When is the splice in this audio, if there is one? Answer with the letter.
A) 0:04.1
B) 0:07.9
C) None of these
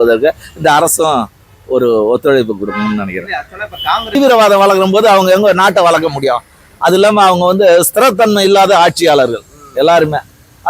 A